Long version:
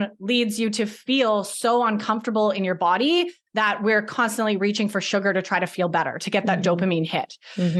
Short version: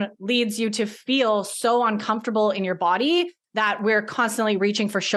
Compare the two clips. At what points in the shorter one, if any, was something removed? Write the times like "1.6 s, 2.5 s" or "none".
none

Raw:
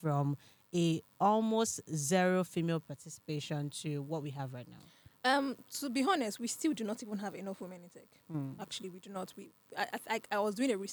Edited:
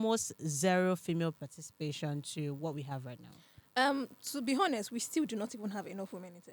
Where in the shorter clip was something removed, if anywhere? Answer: none

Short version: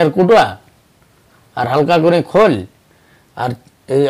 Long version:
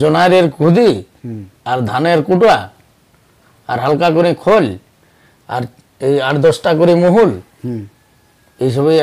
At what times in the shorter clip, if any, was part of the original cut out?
none

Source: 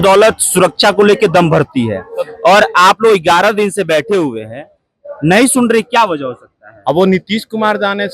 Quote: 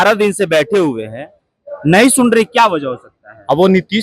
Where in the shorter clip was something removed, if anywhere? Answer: none

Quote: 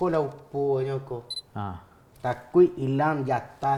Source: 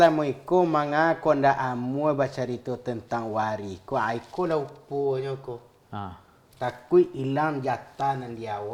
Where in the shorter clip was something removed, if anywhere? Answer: none

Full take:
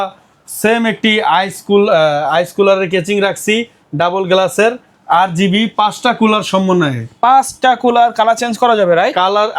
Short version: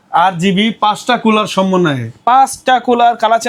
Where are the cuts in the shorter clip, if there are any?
none

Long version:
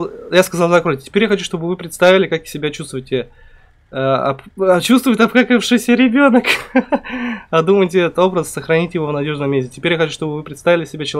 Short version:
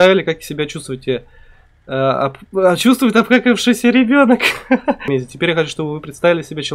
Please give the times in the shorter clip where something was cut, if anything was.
5.0 s

